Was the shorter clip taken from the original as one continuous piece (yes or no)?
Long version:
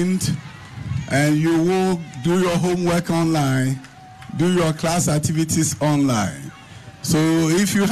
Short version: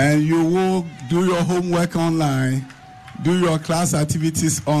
yes